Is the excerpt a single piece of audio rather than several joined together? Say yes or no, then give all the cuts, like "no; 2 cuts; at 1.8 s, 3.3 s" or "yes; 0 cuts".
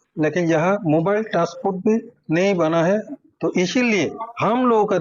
yes; 0 cuts